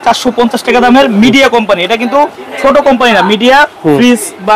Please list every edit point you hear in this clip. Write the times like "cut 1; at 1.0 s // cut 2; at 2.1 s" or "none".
none